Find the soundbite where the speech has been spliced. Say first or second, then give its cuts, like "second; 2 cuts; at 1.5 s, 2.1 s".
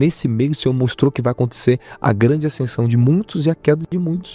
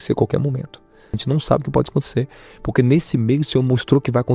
second; 1 cut; at 1.2 s